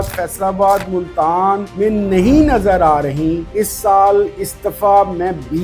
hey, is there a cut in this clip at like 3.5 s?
yes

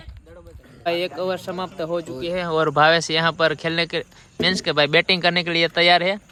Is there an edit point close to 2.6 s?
no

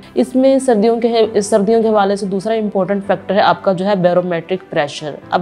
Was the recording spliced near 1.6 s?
no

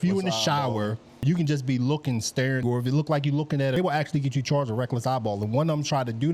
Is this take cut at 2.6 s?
yes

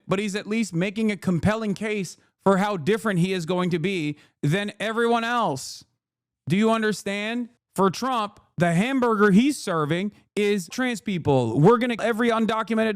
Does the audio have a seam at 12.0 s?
yes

